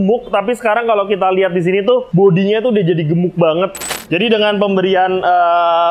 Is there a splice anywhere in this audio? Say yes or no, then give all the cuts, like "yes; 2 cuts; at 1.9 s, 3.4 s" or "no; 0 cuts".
yes; 2 cuts; at 2.1 s, 3.8 s